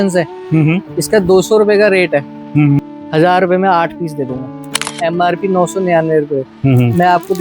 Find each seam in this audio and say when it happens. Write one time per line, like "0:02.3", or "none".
0:02.8
0:04.7